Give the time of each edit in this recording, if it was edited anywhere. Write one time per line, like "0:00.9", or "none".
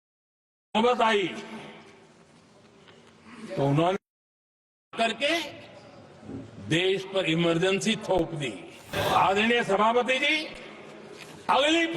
0:08.9